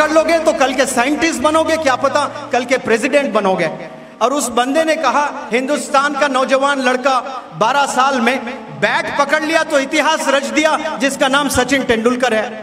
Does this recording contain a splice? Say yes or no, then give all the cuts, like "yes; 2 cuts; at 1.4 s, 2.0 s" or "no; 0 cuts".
no; 0 cuts